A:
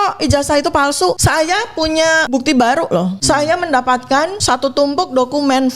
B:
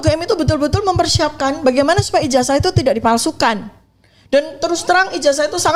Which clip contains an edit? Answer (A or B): A